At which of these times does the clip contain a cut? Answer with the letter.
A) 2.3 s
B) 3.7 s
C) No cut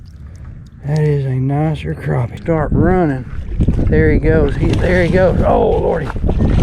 A